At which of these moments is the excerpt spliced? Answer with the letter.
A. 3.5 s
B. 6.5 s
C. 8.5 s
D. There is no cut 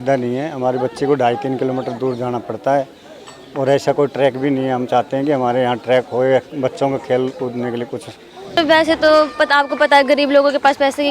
C